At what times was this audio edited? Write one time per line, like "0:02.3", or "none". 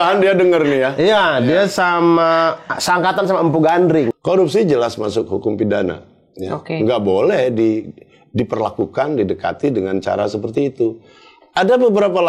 0:04.1

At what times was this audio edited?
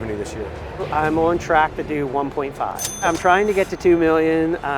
0:00.9
0:03.0

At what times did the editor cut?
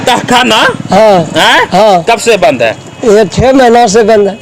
none

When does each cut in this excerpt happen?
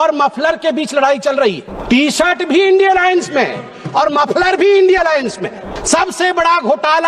0:01.7
0:05.7

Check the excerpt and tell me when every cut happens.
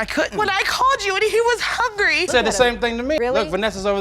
0:02.3

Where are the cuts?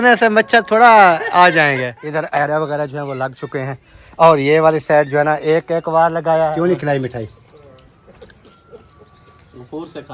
0:02.0
0:06.5

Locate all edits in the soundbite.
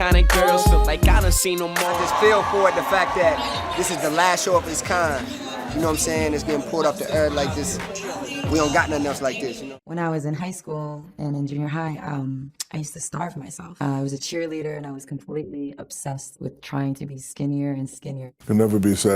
0:02.0
0:09.7
0:18.1

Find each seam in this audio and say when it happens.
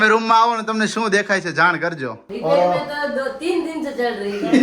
0:02.2

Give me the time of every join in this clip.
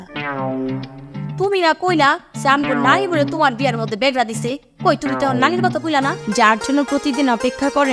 0:06.2

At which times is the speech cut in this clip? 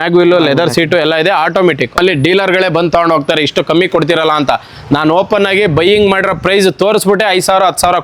0:02.0

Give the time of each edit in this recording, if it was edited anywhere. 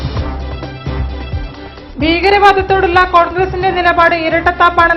none

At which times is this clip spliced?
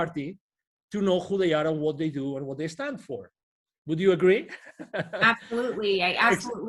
none

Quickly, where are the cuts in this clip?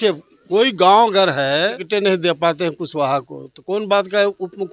0:01.8

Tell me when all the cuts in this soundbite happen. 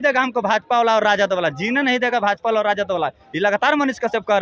none

